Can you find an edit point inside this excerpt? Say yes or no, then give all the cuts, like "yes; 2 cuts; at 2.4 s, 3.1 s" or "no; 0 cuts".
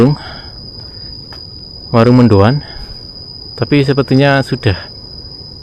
no; 0 cuts